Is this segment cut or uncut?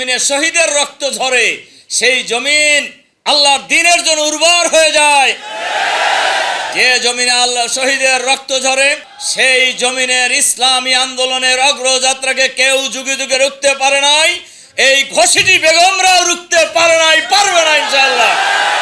uncut